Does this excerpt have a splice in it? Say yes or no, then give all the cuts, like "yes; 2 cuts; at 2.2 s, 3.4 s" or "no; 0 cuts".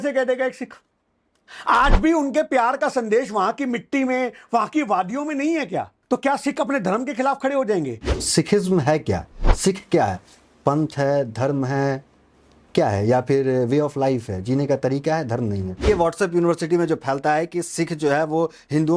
yes; 3 cuts; at 5.9 s, 8.0 s, 15.8 s